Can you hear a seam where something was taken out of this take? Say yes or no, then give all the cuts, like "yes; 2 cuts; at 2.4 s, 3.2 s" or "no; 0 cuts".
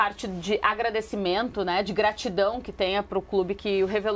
no; 0 cuts